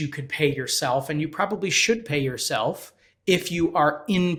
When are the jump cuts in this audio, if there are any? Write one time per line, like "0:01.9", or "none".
none